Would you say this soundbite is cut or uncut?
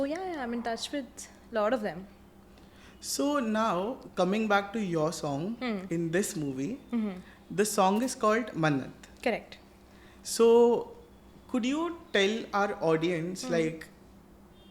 uncut